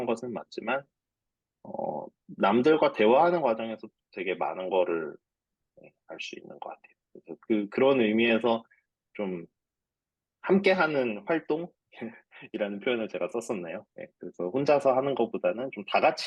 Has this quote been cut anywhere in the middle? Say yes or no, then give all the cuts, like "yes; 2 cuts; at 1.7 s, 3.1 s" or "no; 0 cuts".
no; 0 cuts